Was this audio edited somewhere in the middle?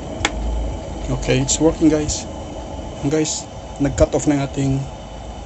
yes; 1 cut; at 3.1 s

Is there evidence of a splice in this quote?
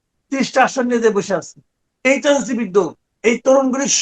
yes; 1 cut; at 3.0 s

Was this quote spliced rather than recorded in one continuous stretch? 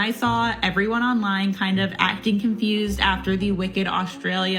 no; 0 cuts

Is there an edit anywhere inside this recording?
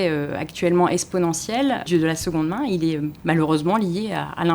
yes; 2 cuts; at 1.9 s, 3.1 s

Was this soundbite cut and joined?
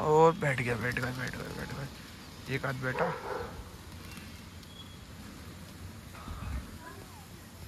no; 0 cuts

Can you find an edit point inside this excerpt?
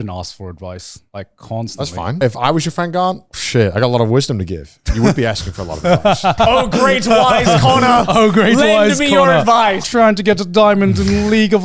yes; 4 cuts; at 0.9 s, 2.2 s, 6.4 s, 9.8 s

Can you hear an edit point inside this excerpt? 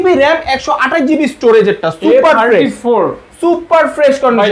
no; 0 cuts

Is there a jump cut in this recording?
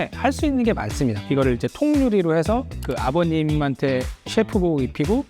yes; 1 cut; at 1.2 s

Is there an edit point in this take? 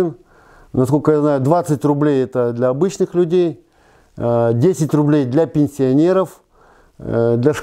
no; 0 cuts

